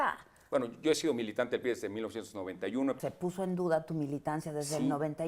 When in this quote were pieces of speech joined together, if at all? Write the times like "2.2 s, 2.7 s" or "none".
3.0 s